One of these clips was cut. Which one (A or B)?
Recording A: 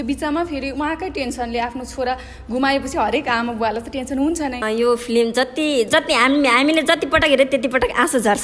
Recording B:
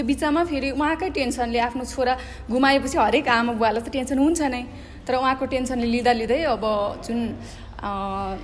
A